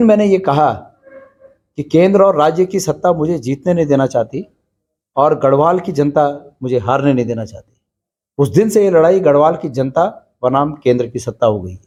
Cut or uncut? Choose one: uncut